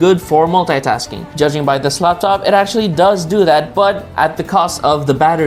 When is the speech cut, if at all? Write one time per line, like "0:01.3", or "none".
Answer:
none